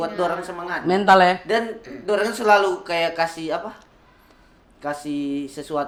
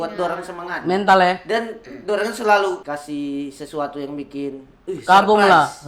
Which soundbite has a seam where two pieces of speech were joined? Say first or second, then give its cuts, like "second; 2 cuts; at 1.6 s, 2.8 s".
second; 1 cut; at 2.8 s